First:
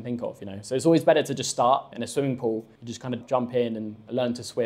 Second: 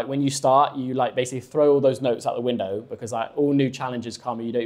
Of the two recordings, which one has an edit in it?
first; 2 cuts; at 1.9 s, 3.2 s

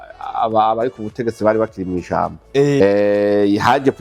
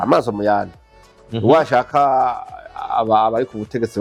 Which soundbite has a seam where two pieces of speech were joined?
first; 1 cut; at 2.8 s

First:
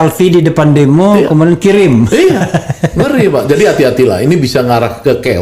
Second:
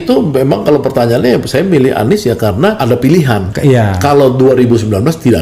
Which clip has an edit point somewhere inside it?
second; 2 cuts; at 2.8 s, 3.5 s

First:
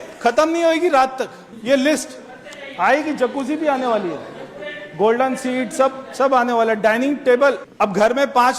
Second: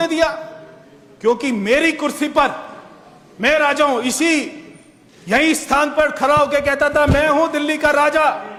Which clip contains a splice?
first; 2 cuts; at 1.5 s, 7.7 s

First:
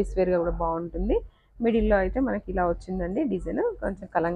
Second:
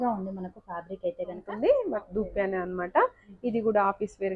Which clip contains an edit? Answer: second; 1 cut; at 1.4 s

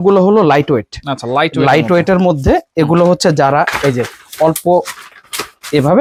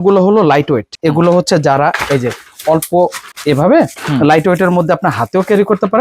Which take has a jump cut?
second; 2 cuts; at 0.9 s, 3.3 s

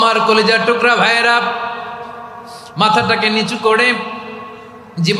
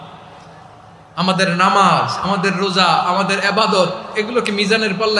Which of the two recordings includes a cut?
first; 1 cut; at 3.1 s

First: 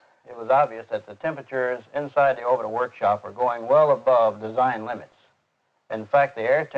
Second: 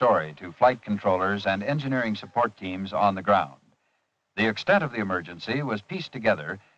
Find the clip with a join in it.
second; 1 cut; at 2.9 s

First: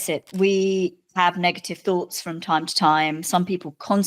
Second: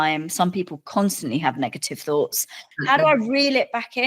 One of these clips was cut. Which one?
second; 1 cut; at 2.6 s

